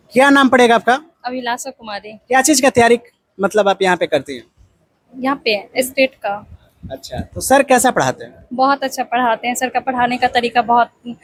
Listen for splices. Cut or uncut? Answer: uncut